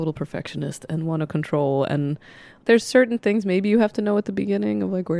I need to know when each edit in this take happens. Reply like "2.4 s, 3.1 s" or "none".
none